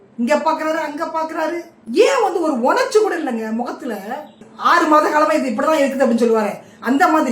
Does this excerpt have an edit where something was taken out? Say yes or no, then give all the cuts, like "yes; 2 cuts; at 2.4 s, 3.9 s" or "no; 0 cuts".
yes; 1 cut; at 4.5 s